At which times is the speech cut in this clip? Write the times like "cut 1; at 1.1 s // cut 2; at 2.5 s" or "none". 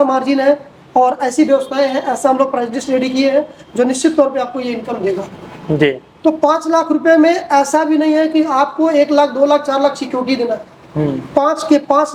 none